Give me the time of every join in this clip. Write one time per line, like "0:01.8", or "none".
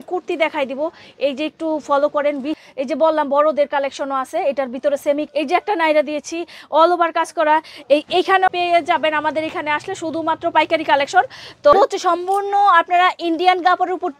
0:02.6
0:05.3
0:08.5
0:11.7